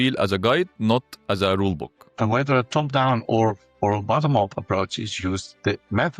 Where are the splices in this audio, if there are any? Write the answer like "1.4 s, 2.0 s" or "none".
2.0 s